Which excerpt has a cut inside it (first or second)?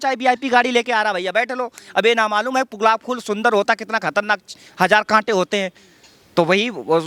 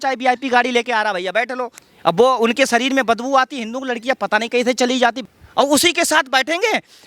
second